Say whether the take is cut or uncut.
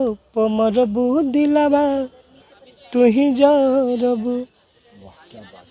uncut